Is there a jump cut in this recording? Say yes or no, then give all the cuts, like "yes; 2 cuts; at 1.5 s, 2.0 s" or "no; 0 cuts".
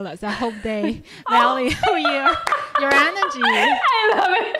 no; 0 cuts